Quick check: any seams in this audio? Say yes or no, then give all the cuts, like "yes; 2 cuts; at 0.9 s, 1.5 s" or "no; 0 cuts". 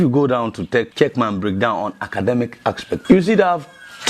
yes; 2 cuts; at 0.9 s, 3.0 s